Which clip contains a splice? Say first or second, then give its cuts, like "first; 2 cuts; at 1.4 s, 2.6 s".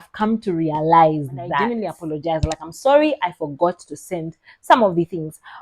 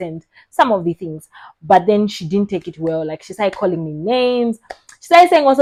first; 1 cut; at 1.8 s